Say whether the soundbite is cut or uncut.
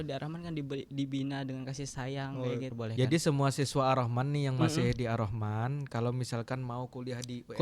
cut